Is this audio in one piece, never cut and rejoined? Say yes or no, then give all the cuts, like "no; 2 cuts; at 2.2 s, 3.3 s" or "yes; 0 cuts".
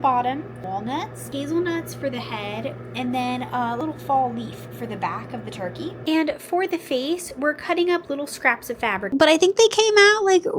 no; 3 cuts; at 1.0 s, 3.8 s, 9.1 s